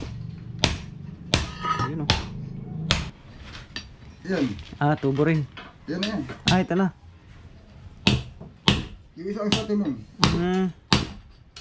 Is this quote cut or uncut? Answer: cut